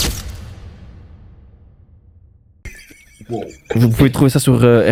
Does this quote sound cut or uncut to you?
uncut